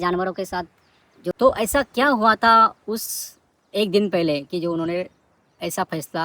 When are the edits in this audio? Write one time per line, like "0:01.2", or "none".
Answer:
0:01.4